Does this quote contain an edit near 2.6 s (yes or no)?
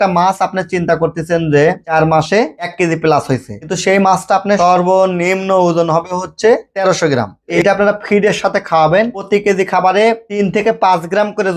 yes